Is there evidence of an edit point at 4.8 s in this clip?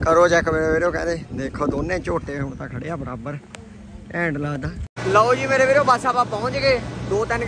yes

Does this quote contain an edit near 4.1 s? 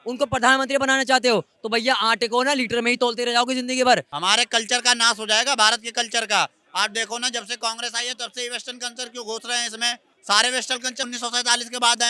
yes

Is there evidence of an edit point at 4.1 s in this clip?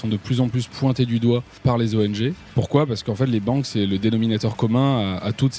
no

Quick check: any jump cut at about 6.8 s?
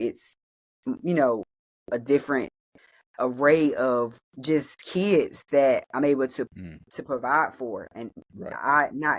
no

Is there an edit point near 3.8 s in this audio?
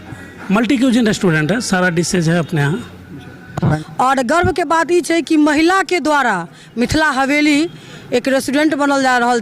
yes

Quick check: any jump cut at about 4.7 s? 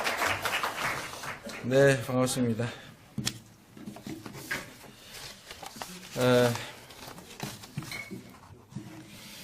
no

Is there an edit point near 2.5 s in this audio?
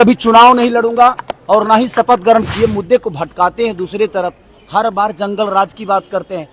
yes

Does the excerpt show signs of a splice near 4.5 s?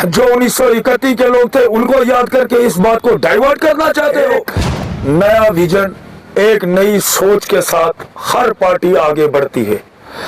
yes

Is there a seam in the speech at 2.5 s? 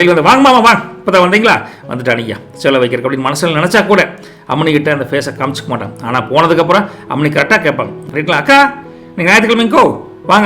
no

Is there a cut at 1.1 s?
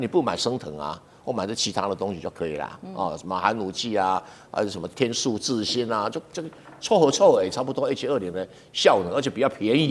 no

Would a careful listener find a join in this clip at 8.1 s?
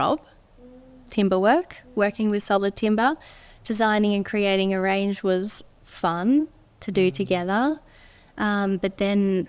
no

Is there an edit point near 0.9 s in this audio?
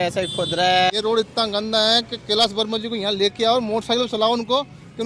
yes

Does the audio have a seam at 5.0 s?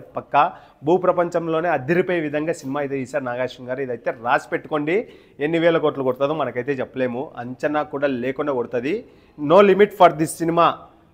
no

